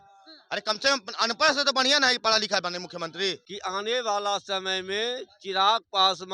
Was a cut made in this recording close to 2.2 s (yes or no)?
no